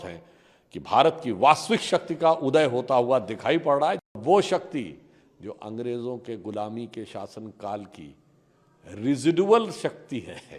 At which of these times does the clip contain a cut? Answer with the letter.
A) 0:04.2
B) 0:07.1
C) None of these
A